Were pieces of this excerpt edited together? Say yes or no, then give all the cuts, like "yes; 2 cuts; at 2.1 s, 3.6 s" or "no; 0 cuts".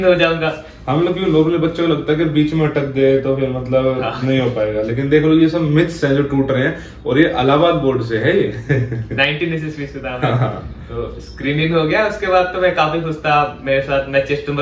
no; 0 cuts